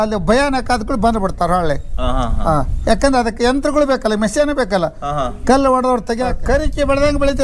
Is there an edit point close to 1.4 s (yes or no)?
no